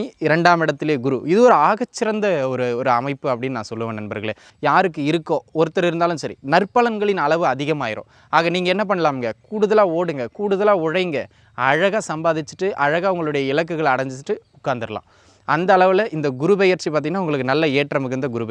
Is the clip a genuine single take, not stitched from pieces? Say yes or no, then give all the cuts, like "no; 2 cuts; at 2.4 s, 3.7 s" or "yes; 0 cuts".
no; 1 cut; at 4.5 s